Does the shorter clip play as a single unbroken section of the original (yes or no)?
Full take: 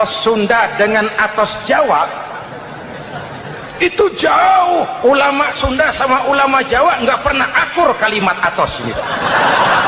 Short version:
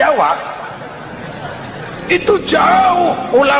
yes